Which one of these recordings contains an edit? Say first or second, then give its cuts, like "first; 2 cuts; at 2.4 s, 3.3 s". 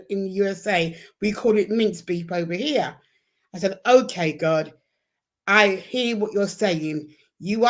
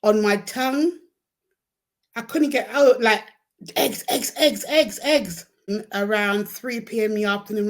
second; 1 cut; at 5.7 s